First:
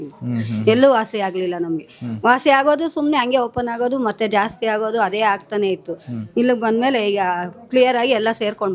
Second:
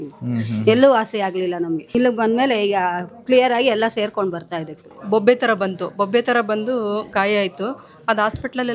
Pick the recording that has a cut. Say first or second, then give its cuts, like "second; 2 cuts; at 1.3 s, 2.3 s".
second; 2 cuts; at 1.9 s, 4.8 s